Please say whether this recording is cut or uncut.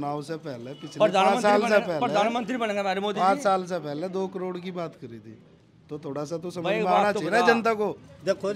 uncut